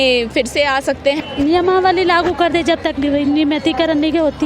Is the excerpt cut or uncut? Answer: cut